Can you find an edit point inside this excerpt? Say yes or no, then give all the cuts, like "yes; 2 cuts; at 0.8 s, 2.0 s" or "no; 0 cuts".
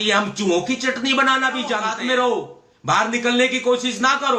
yes; 1 cut; at 1.9 s